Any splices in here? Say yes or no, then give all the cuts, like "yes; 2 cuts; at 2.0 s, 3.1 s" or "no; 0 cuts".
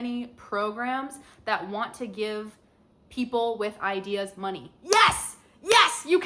no; 0 cuts